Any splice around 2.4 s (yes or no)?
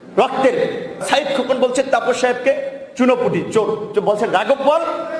no